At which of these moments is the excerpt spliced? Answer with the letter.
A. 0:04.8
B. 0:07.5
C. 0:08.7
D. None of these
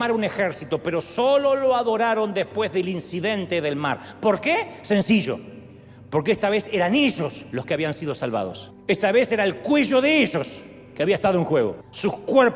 D